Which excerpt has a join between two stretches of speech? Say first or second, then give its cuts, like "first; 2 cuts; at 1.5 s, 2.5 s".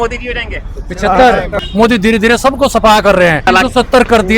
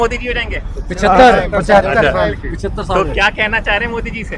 first; 2 cuts; at 1.6 s, 3.4 s